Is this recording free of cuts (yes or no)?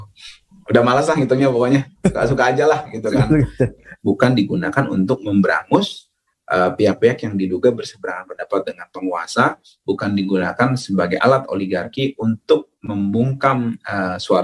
no